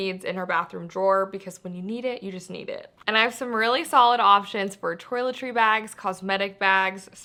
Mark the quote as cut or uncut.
uncut